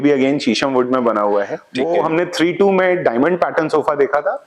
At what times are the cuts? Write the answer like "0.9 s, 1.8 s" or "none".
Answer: 1.6 s

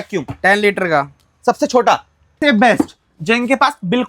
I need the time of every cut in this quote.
2.3 s

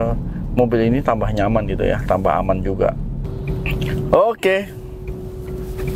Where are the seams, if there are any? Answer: none

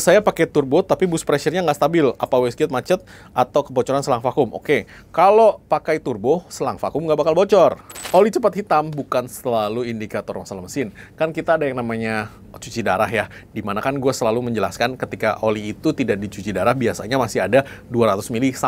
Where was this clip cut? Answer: 7.9 s

